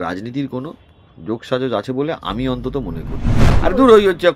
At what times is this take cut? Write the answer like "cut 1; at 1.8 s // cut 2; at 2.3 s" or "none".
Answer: cut 1; at 3.4 s